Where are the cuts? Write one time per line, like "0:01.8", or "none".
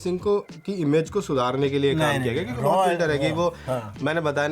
none